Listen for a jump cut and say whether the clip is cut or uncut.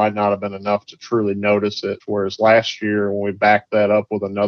cut